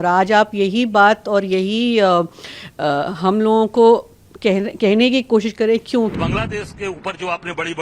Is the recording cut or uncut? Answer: cut